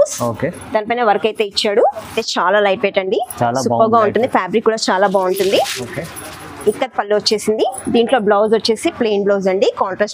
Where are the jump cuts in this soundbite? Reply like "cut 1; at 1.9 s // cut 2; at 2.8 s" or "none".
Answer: cut 1; at 2.2 s